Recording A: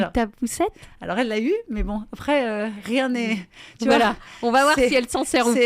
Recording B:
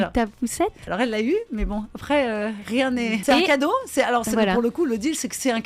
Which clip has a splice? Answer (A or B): B